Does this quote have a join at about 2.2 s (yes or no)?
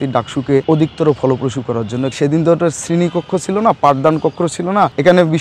yes